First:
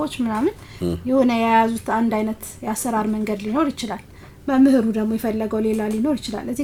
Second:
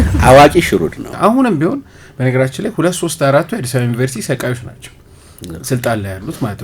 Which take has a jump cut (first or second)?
second